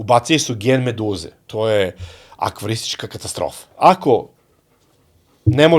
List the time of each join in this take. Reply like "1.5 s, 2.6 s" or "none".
1.4 s, 3.6 s